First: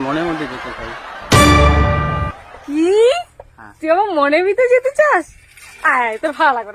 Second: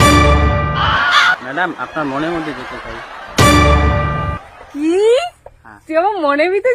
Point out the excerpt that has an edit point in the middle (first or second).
second